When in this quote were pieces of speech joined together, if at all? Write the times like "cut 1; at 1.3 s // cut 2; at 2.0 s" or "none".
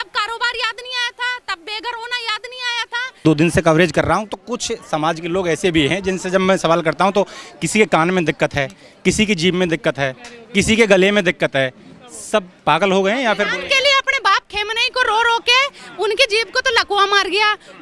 cut 1; at 3.2 s

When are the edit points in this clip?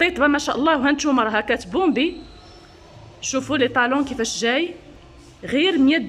none

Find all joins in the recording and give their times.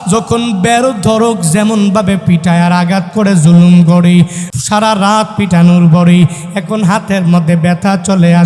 cut 1; at 4.4 s

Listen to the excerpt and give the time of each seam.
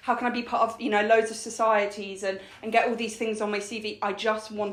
none

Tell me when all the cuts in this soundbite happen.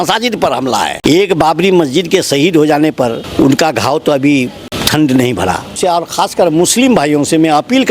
cut 1; at 0.9 s // cut 2; at 3.2 s // cut 3; at 4.7 s // cut 4; at 5.7 s

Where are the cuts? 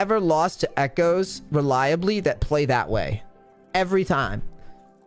none

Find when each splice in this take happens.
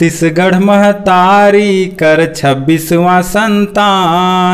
none

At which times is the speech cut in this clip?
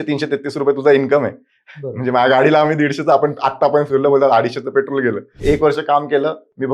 cut 1; at 5.4 s

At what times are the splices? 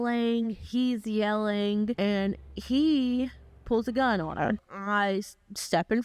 cut 1; at 1.9 s // cut 2; at 4.7 s

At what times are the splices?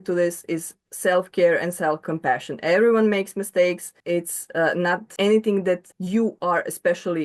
cut 1; at 2.1 s // cut 2; at 3.9 s // cut 3; at 5.1 s // cut 4; at 5.9 s

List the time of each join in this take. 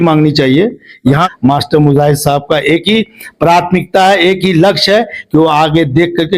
cut 1; at 1.2 s

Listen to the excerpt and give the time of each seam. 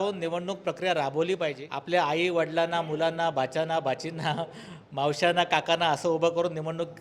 cut 1; at 1.7 s

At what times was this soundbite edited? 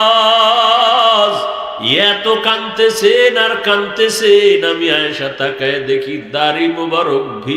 cut 1; at 1.8 s

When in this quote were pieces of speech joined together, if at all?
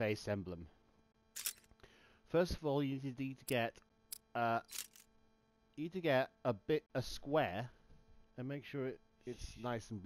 cut 1; at 9.0 s

